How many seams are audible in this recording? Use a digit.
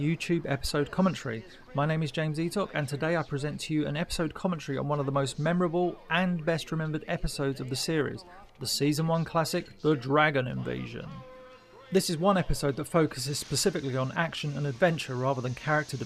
1